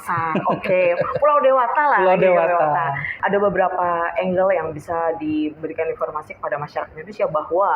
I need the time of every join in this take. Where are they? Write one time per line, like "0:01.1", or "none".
0:03.1